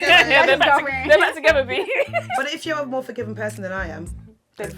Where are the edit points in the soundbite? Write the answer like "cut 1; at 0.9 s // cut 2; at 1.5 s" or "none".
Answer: cut 1; at 2.4 s